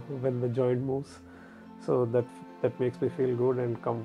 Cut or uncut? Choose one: uncut